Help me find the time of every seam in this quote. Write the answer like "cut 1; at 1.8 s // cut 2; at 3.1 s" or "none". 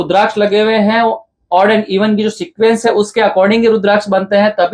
none